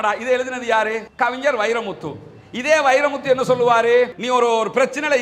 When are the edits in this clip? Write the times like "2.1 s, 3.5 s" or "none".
4.2 s